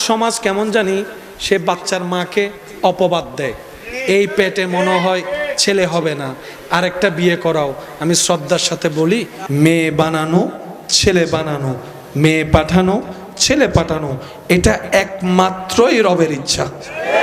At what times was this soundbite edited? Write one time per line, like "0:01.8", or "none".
none